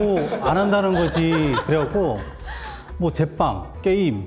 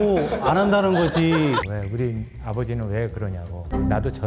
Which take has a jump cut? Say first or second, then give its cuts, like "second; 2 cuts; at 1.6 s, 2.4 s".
second; 1 cut; at 1.6 s